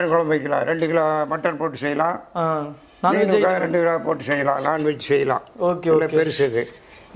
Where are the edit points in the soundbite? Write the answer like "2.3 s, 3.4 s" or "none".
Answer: none